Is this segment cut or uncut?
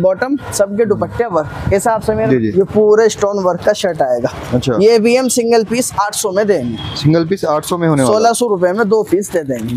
cut